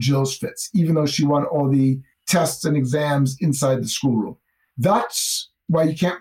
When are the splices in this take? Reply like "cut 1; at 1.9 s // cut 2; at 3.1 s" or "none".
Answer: cut 1; at 2.1 s